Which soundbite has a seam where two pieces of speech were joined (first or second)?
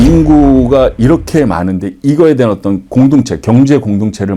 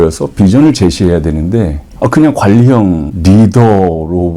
second